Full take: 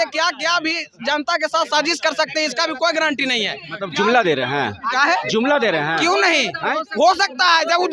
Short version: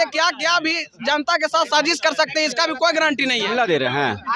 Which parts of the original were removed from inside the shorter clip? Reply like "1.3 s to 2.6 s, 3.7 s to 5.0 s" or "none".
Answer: 3.4 s to 4.0 s

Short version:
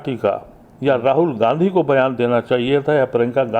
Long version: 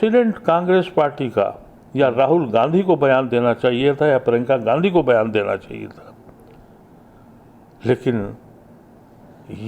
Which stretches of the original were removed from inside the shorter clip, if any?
none

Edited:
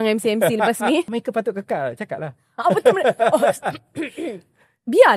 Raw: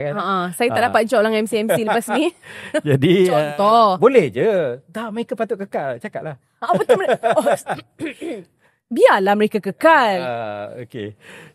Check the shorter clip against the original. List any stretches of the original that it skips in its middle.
2.5 s to 5.2 s

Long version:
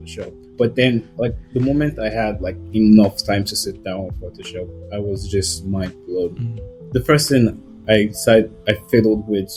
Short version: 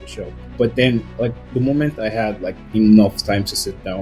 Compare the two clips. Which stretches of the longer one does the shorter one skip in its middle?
none

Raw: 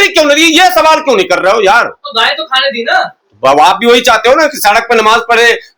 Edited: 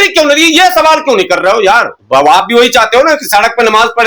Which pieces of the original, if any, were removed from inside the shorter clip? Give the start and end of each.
1.9 s to 3.3 s

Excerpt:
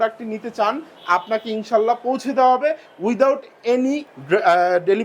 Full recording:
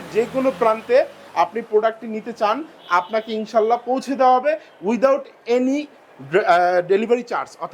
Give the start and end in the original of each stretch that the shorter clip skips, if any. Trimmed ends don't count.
5.9 s to 6.1 s

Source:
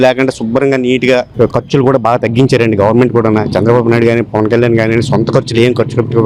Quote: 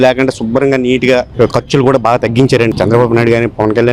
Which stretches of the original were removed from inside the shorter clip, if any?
2.7 s to 3.5 s

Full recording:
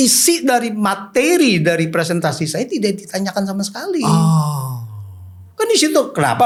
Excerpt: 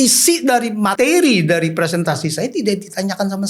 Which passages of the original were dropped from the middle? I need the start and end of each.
0.9 s to 1.1 s

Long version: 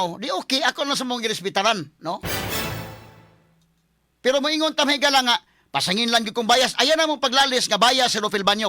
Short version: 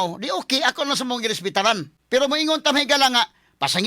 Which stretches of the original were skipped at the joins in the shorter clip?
1.9 s to 4.0 s

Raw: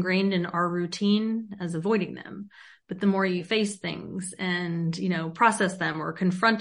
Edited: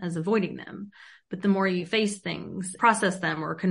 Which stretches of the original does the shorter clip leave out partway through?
4.3 s to 5.3 s

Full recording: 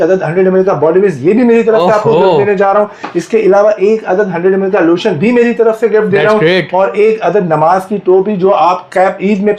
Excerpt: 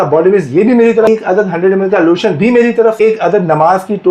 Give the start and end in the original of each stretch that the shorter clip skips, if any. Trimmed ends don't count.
1.8 s to 3.9 s, 5.8 s to 7.0 s

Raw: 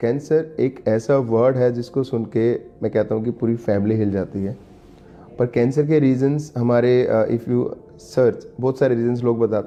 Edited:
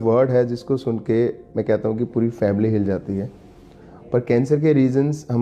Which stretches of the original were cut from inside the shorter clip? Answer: none

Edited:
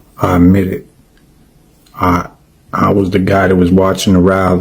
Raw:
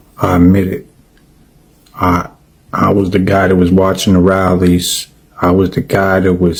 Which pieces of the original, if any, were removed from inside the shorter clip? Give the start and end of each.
none

